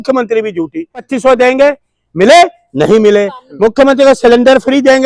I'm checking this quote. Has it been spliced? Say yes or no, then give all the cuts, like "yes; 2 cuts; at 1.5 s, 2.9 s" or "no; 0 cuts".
yes; 1 cut; at 1.1 s